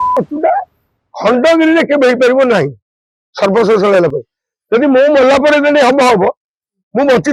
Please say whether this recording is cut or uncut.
uncut